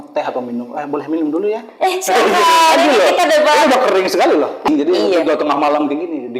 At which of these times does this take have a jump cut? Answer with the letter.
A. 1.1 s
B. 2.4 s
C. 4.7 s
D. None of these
C